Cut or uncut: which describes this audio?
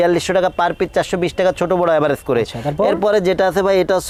uncut